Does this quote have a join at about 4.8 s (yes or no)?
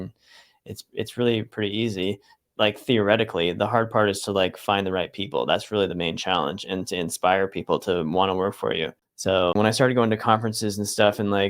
no